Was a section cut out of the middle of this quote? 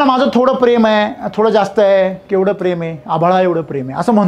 no; 0 cuts

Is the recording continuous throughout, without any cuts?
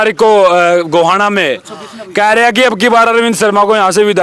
yes; 0 cuts

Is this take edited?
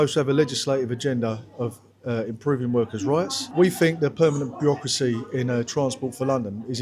yes; 1 cut; at 3.4 s

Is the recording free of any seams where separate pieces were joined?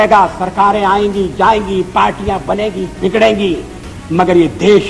yes; 0 cuts

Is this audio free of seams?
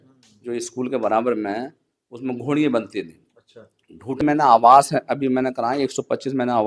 no; 1 cut; at 4.2 s

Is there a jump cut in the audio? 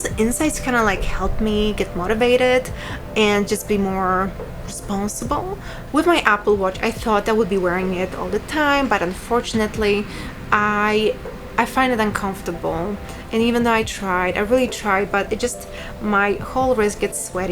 yes; 1 cut; at 5.7 s

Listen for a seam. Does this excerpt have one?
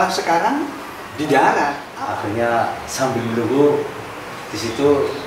yes; 1 cut; at 1.9 s

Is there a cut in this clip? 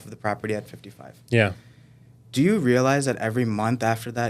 no; 0 cuts

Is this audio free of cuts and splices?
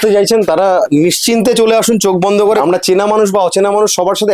no; 1 cut; at 2.6 s

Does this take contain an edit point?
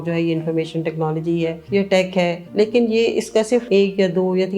yes; 3 cuts; at 1.6 s, 2.4 s, 3.7 s

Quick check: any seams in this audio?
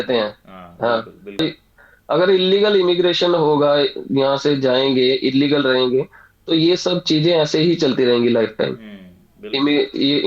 yes; 1 cut; at 1.4 s

